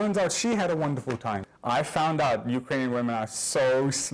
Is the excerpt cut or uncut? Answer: cut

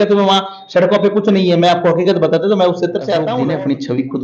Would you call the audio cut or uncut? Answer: cut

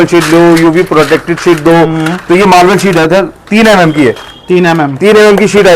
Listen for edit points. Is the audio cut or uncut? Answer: uncut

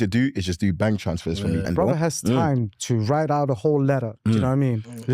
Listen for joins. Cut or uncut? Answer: cut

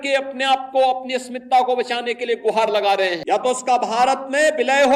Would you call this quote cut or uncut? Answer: cut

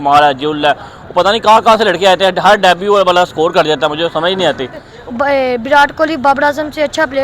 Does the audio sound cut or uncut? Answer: cut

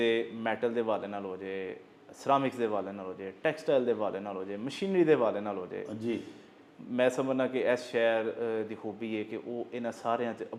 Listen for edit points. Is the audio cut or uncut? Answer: uncut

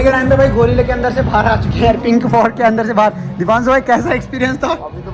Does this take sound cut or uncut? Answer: uncut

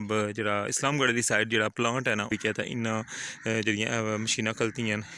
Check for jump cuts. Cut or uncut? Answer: cut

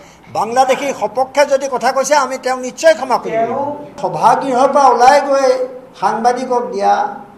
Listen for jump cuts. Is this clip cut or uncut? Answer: cut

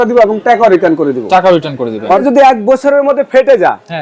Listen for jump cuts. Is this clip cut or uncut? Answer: cut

